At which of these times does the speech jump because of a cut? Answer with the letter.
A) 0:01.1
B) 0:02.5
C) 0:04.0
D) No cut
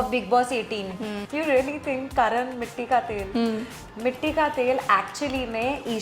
A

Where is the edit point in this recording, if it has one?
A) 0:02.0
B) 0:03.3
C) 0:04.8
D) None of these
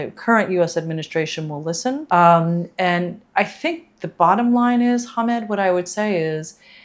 A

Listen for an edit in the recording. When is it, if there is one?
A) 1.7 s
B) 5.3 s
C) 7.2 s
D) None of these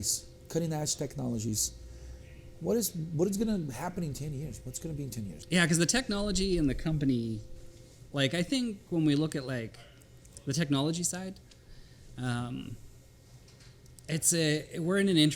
B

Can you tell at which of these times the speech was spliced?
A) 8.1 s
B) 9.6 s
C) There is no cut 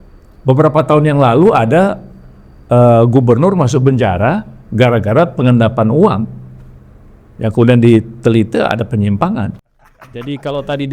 B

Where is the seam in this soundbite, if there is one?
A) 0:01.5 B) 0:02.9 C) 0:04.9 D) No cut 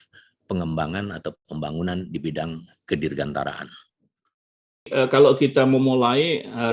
C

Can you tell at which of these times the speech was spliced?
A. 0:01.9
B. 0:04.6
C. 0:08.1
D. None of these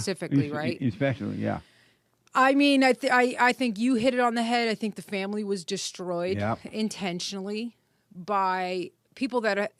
D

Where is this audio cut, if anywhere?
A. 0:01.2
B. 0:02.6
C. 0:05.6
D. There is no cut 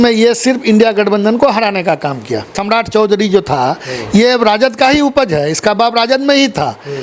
B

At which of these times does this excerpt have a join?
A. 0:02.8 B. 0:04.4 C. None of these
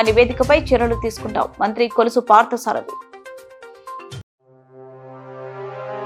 C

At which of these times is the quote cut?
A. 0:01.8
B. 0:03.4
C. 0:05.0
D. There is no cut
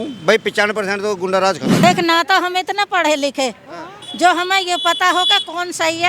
A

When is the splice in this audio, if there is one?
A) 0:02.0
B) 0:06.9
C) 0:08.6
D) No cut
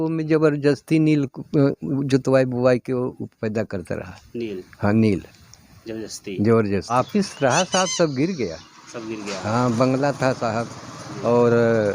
B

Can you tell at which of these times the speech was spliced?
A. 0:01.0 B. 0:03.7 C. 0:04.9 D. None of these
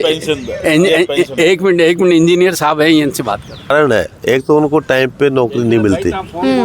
B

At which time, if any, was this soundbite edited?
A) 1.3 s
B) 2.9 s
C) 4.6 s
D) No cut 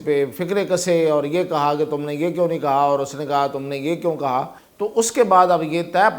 C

